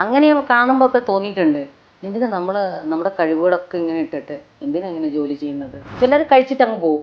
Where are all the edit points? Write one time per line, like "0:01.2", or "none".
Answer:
0:05.8